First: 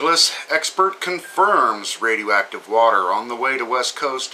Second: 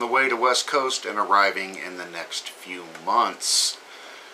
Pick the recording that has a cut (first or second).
second